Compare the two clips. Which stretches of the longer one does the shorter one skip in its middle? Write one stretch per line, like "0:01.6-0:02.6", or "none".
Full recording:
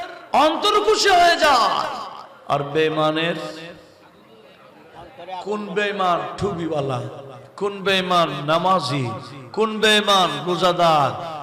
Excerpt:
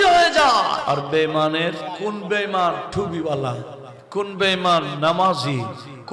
0:01.9-0:02.4
0:03.5-0:05.3